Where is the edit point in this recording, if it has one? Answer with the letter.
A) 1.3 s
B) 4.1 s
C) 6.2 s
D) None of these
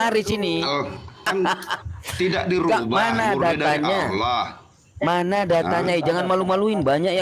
A